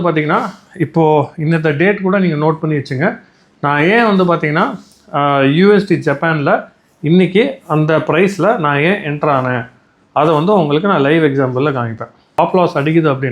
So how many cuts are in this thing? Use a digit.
1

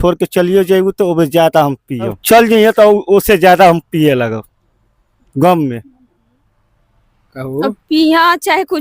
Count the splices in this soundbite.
1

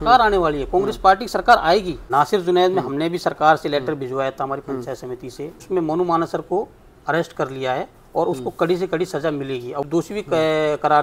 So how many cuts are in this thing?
3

